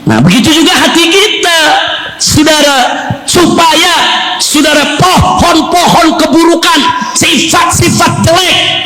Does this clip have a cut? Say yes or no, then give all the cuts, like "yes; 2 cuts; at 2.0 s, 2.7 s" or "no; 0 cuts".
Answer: no; 0 cuts